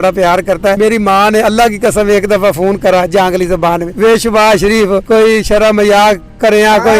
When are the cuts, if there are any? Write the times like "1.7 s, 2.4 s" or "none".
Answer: 0.8 s, 3.9 s, 5.0 s